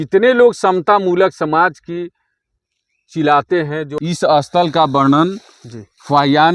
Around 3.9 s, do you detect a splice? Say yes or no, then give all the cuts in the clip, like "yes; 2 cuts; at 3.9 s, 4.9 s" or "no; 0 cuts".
yes; 1 cut; at 3.9 s